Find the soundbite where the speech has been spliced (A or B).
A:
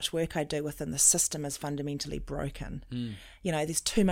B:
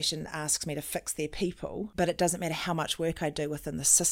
B